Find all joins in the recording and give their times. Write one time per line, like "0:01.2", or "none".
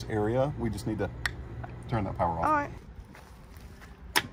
0:01.6
0:02.9